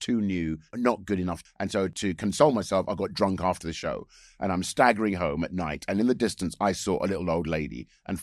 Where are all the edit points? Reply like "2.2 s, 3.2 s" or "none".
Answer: 1.4 s